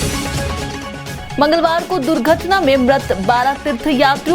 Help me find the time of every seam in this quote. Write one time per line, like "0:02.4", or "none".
0:01.1